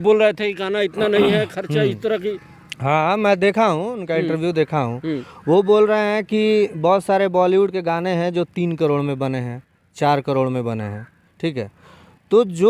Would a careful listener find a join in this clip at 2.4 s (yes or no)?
no